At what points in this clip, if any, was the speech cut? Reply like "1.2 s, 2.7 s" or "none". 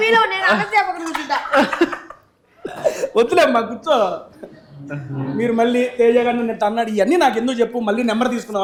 none